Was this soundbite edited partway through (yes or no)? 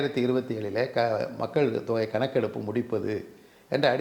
no